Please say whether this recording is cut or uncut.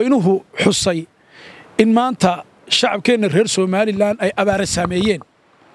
uncut